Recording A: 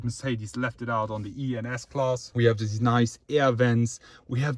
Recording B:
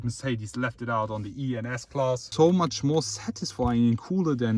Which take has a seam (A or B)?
B